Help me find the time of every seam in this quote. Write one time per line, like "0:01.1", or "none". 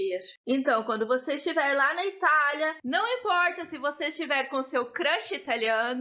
0:02.8